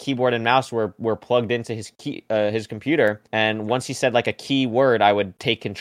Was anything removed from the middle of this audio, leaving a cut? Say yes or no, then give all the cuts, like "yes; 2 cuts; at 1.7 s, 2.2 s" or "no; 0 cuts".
no; 0 cuts